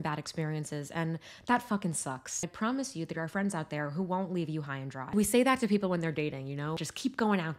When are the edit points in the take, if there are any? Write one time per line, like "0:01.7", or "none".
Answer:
0:02.5
0:05.1
0:06.8